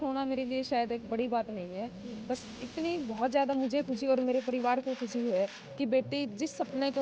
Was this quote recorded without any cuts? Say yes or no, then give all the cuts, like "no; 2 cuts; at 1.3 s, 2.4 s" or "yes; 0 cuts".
yes; 0 cuts